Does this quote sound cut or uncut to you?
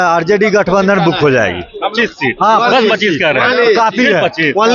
uncut